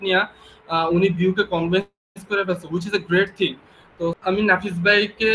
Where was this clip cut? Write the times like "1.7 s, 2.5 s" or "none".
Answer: 4.2 s